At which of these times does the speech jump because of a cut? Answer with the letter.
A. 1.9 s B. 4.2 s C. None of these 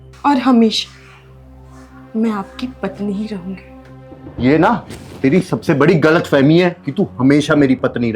B